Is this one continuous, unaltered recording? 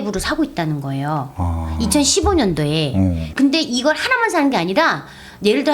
no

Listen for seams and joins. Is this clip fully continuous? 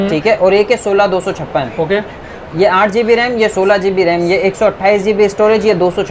yes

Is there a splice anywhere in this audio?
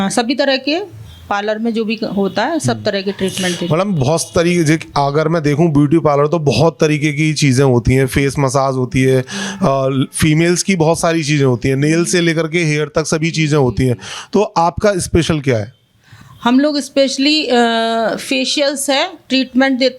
no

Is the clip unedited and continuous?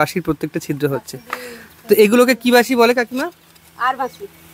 yes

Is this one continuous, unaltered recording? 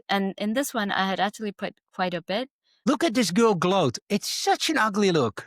no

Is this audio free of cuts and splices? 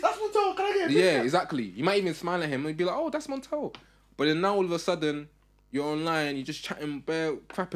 yes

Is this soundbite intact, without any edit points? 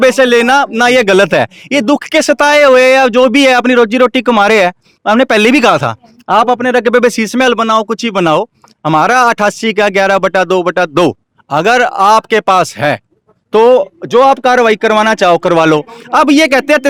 yes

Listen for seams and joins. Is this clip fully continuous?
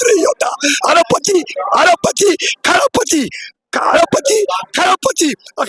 yes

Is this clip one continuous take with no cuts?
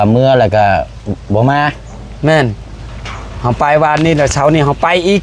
yes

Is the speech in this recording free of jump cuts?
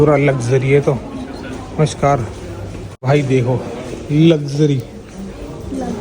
no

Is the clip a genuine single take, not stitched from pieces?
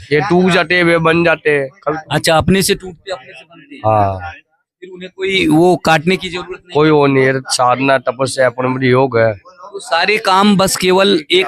yes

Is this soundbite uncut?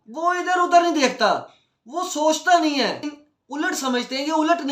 no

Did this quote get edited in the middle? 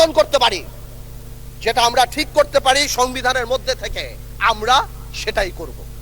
no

